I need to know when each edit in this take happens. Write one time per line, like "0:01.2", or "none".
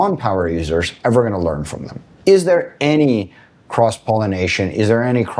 0:02.1

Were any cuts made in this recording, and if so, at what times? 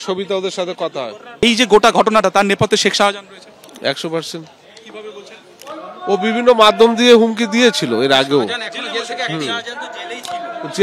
0:01.4

